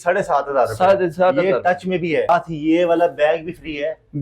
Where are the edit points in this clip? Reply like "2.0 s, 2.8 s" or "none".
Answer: 2.3 s